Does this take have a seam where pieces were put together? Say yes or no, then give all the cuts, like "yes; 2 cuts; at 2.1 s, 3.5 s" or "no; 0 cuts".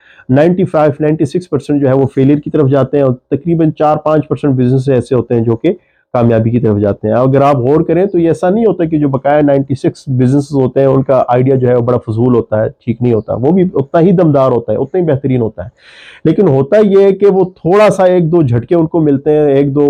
no; 0 cuts